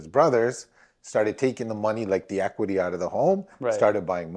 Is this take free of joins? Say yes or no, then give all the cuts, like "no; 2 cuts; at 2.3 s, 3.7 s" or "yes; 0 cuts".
yes; 0 cuts